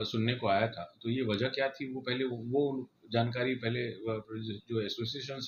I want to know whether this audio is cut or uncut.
uncut